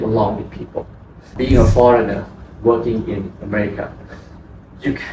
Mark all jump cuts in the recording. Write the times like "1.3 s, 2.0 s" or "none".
1.4 s